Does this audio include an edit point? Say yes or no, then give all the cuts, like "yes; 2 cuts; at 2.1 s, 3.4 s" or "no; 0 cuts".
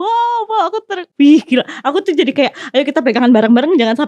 yes; 1 cut; at 1.0 s